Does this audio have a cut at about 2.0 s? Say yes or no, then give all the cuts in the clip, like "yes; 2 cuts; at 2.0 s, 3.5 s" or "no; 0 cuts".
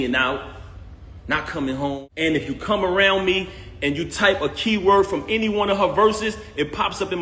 yes; 1 cut; at 2.0 s